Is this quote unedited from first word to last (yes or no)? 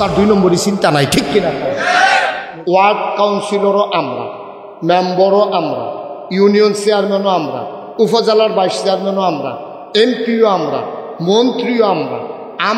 no